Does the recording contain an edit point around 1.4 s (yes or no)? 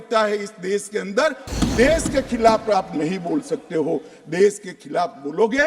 yes